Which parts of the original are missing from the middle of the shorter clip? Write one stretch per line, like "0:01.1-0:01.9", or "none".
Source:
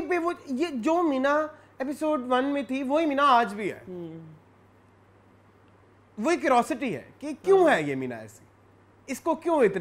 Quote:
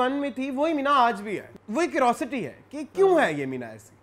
0:03.9-0:06.0